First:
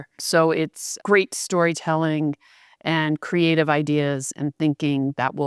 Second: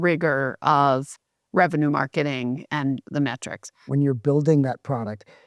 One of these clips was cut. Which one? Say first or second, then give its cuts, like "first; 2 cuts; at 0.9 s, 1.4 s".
second; 1 cut; at 3.9 s